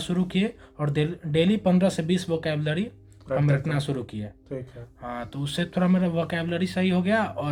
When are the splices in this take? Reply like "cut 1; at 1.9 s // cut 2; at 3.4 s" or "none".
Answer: none